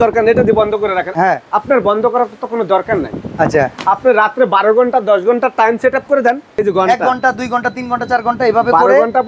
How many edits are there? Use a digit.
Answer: 2